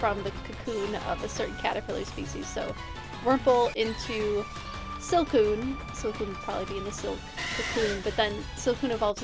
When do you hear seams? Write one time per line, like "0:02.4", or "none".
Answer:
none